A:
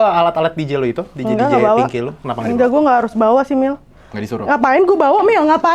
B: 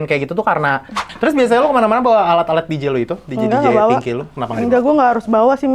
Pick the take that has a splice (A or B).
B